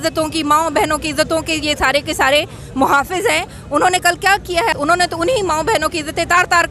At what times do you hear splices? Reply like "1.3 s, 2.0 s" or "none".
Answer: 4.7 s